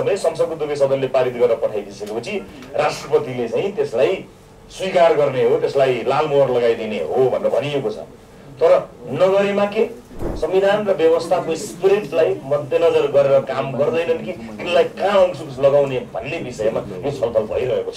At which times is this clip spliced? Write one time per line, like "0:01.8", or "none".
0:10.3